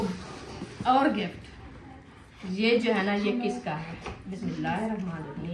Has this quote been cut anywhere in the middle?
yes; 1 cut; at 4.4 s

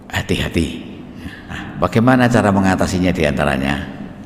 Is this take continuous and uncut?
no; 1 cut; at 1.7 s

